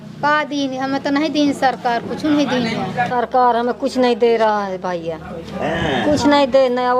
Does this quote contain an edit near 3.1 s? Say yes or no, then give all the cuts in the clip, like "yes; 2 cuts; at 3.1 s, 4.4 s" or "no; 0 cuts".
yes; 1 cut; at 3.1 s